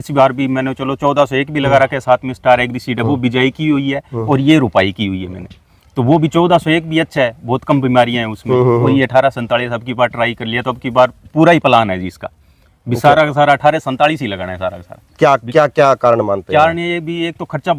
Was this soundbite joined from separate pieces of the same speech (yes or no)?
no